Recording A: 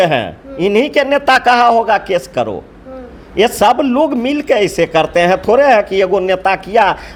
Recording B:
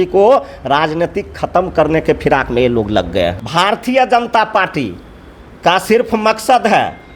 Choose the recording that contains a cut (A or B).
B